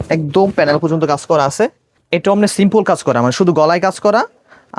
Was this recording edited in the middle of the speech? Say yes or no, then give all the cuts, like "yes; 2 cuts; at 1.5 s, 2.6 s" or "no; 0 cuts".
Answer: yes; 1 cut; at 1.9 s